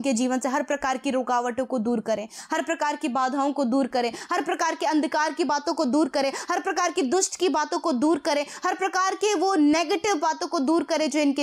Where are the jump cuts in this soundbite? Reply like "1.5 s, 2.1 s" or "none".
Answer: none